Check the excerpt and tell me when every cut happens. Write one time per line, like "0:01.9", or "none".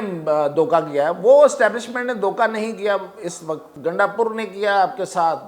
0:03.7